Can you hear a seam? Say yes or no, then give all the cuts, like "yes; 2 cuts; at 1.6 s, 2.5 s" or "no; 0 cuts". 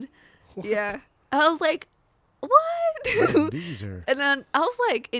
no; 0 cuts